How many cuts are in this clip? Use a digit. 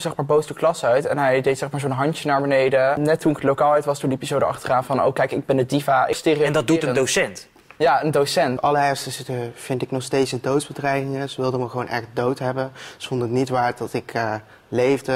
3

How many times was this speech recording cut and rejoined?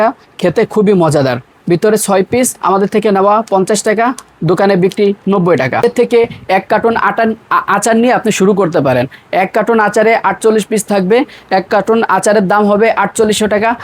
2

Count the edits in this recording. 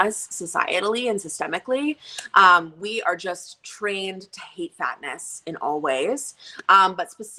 0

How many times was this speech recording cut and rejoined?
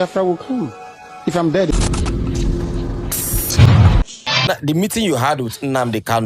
2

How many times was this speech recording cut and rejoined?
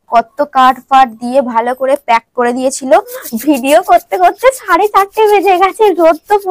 1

